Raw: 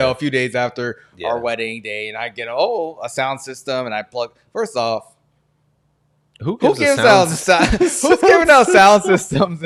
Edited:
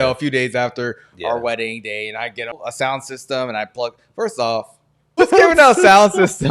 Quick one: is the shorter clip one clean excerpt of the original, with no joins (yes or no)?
no